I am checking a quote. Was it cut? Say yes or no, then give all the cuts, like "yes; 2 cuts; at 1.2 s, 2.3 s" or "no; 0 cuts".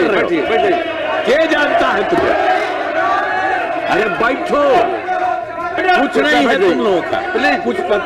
yes; 1 cut; at 5.7 s